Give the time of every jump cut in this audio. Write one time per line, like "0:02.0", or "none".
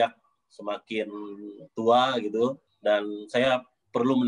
0:02.7